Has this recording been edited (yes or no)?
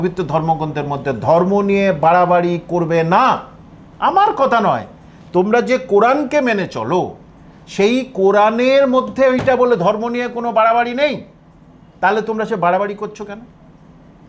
no